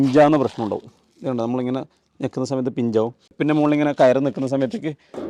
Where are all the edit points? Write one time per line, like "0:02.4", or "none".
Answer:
none

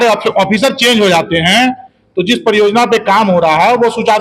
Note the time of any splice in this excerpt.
none

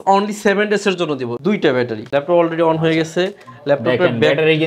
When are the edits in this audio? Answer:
0:01.7

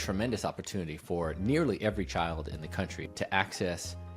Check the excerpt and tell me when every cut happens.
0:03.0

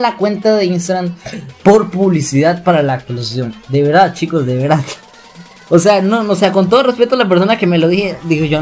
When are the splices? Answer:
none

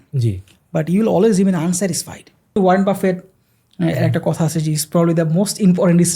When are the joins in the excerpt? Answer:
0:02.6

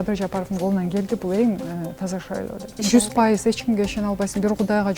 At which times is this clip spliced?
0:02.8

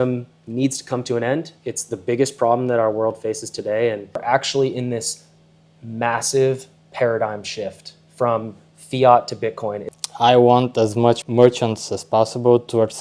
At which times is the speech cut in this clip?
0:04.2
0:09.8
0:11.2

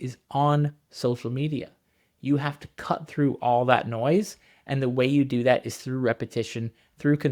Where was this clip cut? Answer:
none

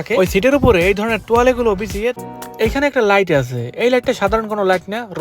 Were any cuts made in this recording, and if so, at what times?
0:02.2

